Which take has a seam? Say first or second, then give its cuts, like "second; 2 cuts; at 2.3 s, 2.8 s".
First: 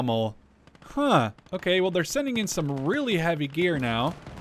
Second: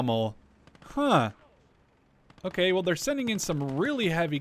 first; 1 cut; at 1.4 s